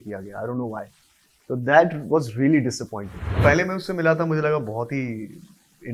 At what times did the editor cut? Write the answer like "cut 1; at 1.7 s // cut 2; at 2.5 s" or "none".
cut 1; at 3.2 s